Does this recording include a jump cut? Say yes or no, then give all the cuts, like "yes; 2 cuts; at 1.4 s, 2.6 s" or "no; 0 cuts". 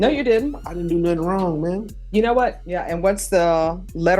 yes; 1 cut; at 2.7 s